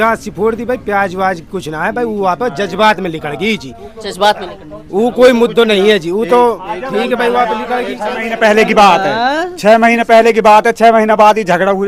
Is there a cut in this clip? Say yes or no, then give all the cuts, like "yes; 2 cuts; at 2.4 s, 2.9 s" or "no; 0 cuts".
no; 0 cuts